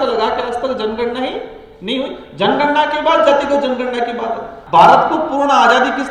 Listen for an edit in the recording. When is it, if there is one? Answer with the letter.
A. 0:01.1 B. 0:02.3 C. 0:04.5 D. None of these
C